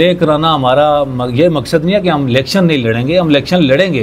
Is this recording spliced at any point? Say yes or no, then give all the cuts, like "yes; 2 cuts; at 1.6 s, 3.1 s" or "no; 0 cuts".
no; 0 cuts